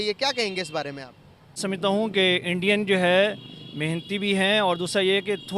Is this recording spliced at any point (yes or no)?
yes